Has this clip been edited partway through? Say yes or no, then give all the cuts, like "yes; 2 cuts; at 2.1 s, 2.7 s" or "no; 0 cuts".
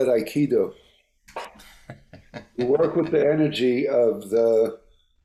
no; 0 cuts